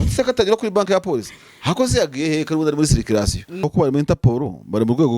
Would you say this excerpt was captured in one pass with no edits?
no; 1 cut; at 3.7 s

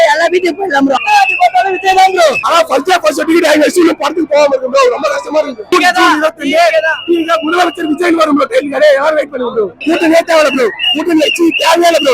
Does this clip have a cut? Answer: yes; 4 cuts; at 1.0 s, 2.4 s, 5.7 s, 9.8 s

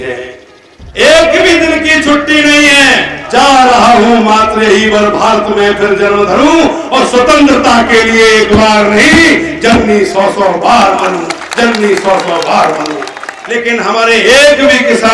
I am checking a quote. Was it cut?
yes; 2 cuts; at 3.2 s, 13.4 s

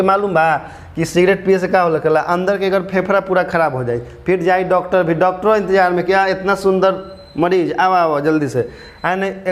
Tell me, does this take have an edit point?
no; 0 cuts

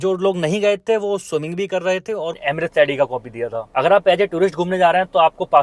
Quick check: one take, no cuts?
no; 1 cut; at 2.4 s

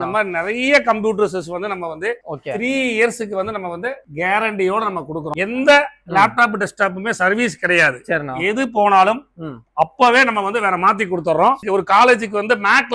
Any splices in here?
yes; 2 cuts; at 5.3 s, 11.6 s

